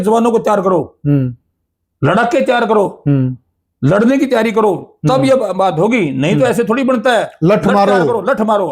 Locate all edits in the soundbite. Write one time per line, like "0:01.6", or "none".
none